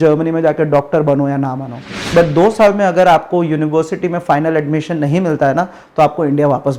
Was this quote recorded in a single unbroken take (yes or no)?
no